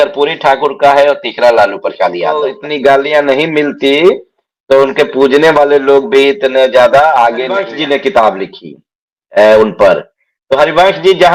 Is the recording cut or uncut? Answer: cut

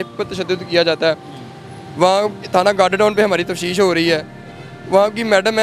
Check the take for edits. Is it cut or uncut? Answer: uncut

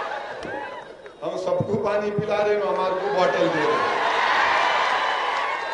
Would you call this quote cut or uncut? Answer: uncut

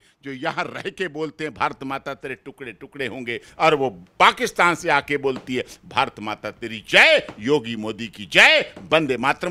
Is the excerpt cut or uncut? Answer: uncut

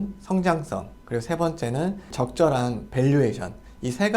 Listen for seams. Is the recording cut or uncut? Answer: uncut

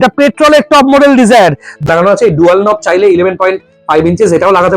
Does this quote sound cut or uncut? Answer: cut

